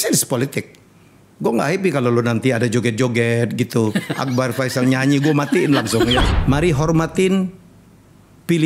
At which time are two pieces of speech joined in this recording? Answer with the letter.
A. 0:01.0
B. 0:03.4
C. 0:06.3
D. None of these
C